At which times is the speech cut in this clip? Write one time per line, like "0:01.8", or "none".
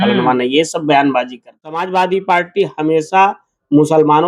0:01.8